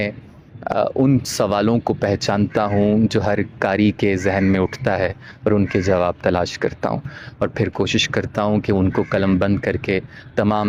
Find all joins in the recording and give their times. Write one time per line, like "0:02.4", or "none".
none